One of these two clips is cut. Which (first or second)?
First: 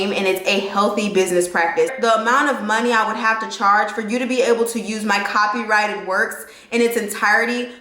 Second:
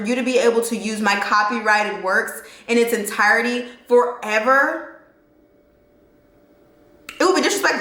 first